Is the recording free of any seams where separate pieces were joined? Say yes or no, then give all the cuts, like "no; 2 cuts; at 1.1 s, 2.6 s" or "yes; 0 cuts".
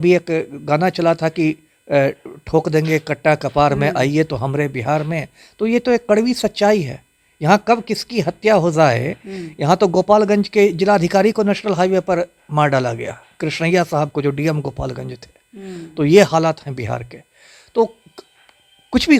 yes; 0 cuts